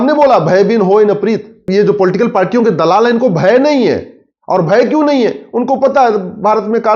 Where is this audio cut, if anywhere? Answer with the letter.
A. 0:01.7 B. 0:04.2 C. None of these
A